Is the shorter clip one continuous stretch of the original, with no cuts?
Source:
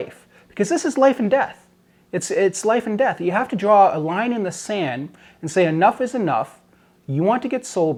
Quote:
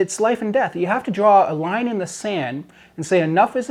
yes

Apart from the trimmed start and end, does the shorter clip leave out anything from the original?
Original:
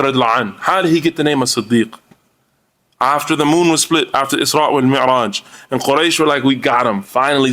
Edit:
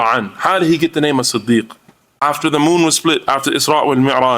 yes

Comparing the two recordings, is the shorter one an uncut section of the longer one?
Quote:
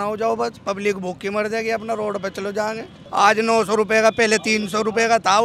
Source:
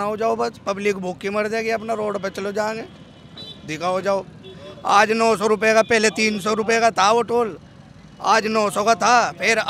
no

